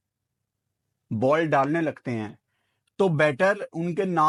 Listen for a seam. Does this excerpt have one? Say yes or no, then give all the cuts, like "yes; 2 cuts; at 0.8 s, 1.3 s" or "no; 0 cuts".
no; 0 cuts